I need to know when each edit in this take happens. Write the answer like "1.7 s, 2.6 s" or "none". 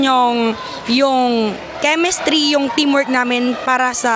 none